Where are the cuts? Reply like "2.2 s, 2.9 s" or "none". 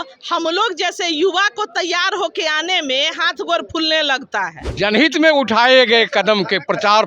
4.6 s